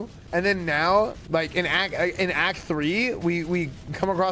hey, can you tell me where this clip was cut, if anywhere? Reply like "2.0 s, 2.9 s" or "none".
none